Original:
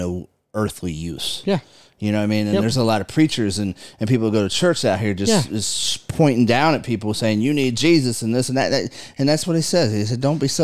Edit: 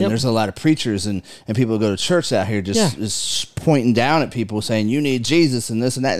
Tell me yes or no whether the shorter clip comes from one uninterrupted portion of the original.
yes